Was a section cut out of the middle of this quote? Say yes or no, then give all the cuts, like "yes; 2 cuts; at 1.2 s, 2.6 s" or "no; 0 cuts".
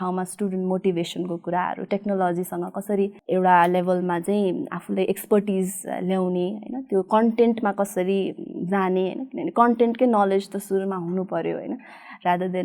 no; 0 cuts